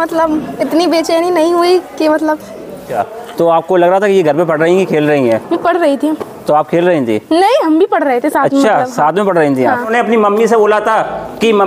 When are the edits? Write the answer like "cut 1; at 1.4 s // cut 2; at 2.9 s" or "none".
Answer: cut 1; at 2.9 s // cut 2; at 9.9 s